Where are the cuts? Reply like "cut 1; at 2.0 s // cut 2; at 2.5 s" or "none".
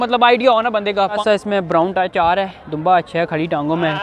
cut 1; at 1.2 s